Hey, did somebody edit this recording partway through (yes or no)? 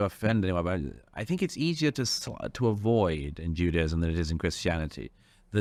no